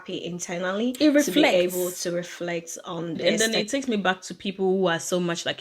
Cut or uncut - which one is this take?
cut